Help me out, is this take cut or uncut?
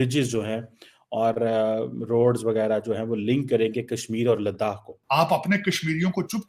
cut